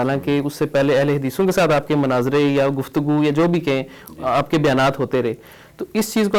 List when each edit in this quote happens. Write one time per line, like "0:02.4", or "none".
none